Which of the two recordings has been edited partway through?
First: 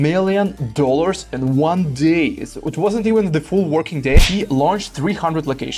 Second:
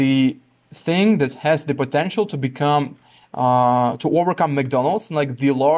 first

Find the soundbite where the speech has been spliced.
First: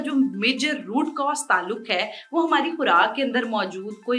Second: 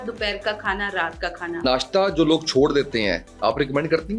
second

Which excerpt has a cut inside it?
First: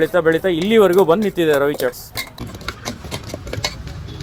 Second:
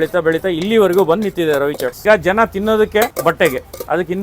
second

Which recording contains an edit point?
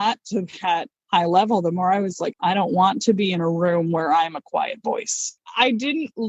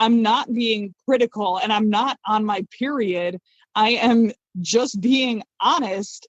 first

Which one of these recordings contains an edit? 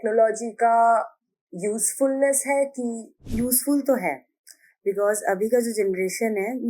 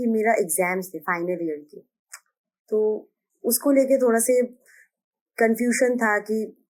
first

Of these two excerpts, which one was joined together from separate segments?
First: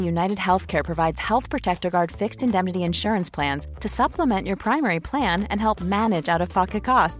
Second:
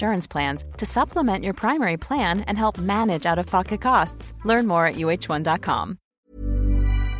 second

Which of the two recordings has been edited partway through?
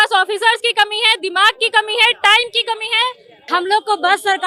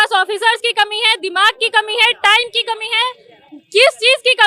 first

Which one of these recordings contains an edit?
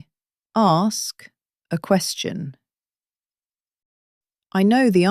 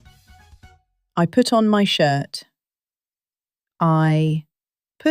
second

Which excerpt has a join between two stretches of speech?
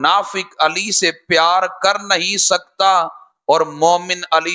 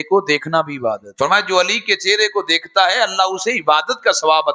second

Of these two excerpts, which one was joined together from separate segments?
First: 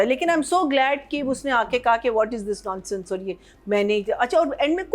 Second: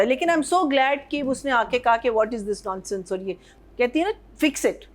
second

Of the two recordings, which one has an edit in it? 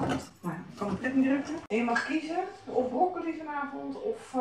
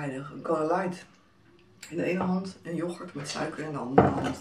first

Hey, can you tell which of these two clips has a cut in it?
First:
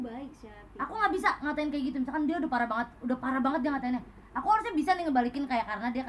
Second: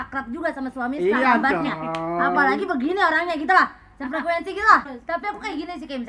second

